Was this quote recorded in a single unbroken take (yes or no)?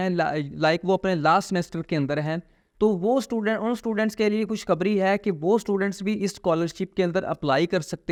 yes